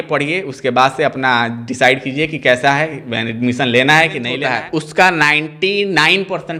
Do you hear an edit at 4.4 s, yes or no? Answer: yes